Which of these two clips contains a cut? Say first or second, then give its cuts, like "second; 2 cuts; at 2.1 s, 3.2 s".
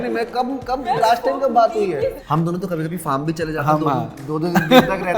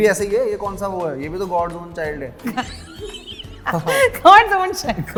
first; 1 cut; at 2.2 s